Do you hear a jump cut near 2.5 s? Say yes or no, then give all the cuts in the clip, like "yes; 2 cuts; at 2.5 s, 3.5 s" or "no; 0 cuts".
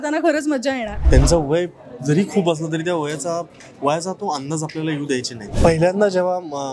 no; 2 cuts; at 1.0 s, 5.4 s